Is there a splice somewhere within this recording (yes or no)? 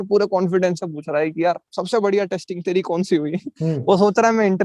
no